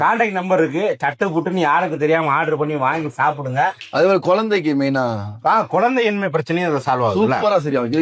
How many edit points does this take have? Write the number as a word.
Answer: zero